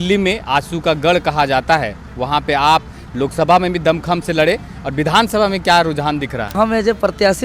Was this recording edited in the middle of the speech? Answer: yes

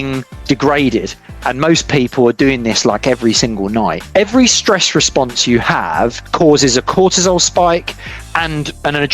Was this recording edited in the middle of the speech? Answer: yes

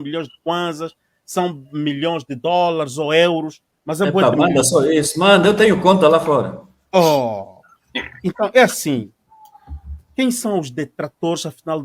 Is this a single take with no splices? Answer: yes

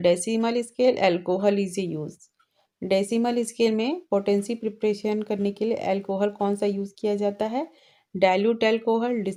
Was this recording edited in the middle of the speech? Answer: no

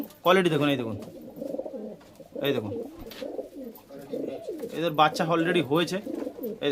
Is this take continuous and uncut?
yes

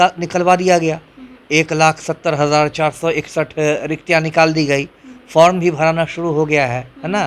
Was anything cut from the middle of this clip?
no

